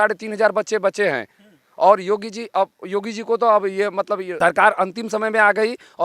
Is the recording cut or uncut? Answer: cut